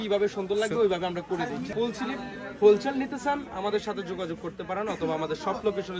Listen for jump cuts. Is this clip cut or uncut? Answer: cut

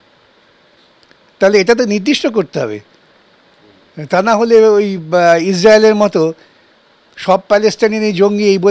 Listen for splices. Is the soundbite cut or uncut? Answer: uncut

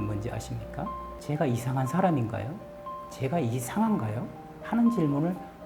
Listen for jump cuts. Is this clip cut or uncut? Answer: cut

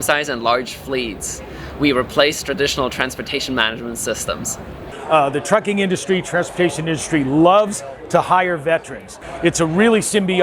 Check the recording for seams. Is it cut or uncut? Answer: cut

